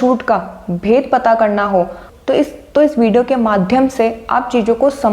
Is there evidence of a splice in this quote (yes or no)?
no